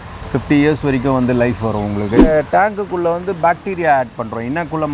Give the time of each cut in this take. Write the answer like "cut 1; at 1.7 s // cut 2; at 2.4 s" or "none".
cut 1; at 2.2 s